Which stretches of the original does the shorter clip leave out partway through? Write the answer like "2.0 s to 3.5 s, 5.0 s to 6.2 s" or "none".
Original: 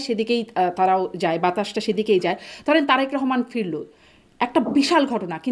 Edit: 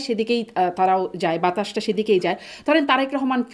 none